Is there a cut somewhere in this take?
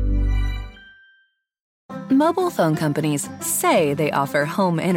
yes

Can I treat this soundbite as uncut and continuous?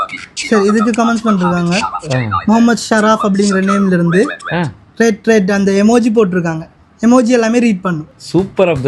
yes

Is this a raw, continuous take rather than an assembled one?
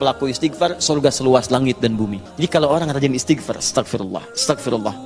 no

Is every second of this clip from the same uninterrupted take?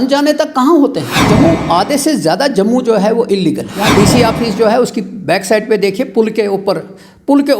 no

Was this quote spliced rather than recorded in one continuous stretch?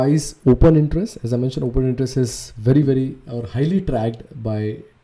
no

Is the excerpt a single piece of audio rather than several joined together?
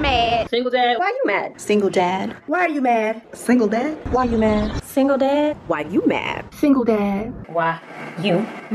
yes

